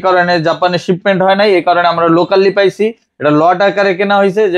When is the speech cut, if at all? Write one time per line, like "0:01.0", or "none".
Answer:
none